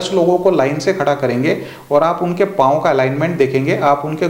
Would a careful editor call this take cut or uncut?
uncut